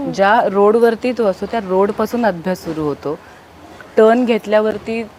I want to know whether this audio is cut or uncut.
uncut